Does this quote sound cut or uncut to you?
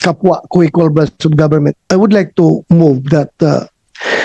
cut